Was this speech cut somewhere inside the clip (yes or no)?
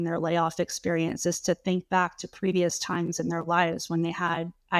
no